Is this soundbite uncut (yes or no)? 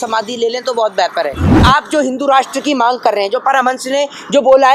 no